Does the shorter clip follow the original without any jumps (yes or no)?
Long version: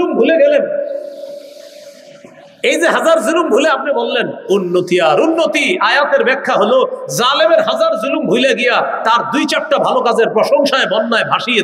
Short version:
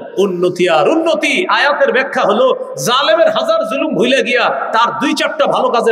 yes